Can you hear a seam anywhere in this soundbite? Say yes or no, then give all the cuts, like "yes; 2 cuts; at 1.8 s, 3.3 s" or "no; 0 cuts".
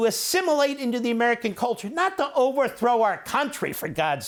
no; 0 cuts